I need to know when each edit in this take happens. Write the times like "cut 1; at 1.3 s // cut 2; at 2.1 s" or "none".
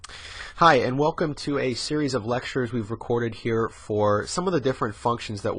none